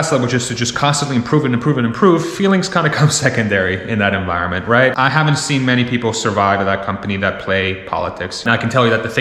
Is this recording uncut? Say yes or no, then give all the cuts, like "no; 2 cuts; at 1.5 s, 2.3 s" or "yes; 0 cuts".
no; 2 cuts; at 5.0 s, 8.4 s